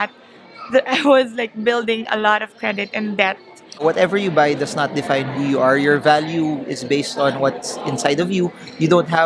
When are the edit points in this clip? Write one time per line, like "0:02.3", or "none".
0:03.8